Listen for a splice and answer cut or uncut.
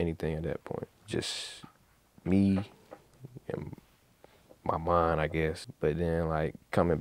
cut